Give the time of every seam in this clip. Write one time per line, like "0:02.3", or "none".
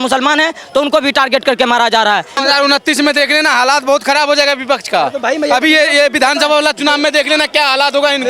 0:02.4